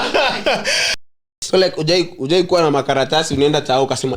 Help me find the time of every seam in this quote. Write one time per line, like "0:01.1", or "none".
0:01.3